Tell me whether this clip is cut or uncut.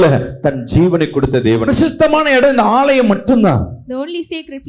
cut